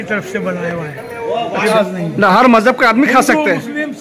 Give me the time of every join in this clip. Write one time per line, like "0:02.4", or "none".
0:01.7